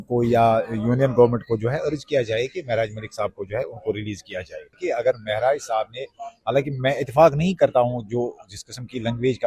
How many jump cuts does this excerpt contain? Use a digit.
0